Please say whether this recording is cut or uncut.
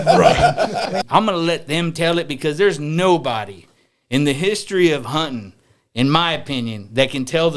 cut